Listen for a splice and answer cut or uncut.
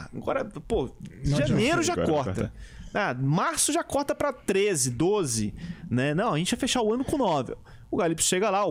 uncut